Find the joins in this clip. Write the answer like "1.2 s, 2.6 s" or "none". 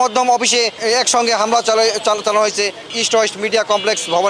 2.9 s